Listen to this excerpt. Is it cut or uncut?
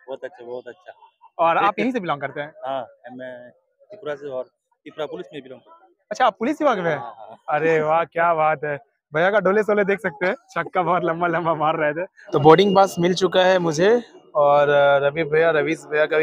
cut